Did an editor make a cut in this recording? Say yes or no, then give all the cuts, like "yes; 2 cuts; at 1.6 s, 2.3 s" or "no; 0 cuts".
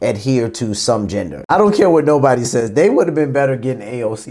yes; 1 cut; at 1.4 s